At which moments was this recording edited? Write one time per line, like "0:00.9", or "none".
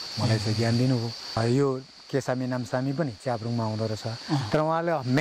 0:01.4